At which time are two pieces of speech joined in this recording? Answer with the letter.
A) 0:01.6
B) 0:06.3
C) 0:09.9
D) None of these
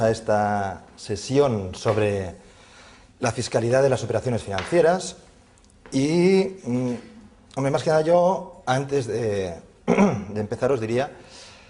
B